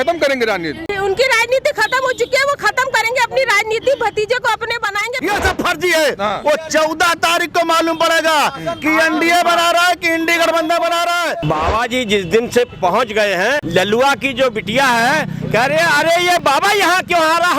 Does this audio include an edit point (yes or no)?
yes